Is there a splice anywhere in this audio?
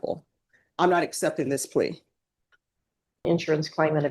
yes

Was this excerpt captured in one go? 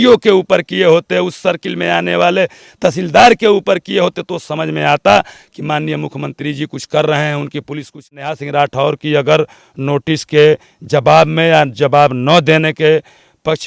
no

